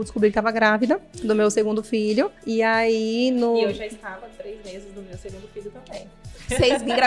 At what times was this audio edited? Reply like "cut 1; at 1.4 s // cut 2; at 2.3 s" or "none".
cut 1; at 1.1 s // cut 2; at 2.4 s